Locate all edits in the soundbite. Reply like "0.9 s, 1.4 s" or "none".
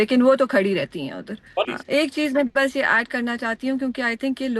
1.7 s